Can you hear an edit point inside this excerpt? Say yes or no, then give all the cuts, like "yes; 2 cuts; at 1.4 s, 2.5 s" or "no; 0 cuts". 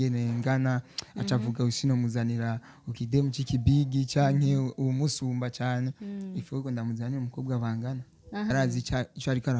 yes; 1 cut; at 8.5 s